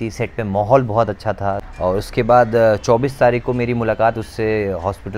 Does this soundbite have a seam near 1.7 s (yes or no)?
yes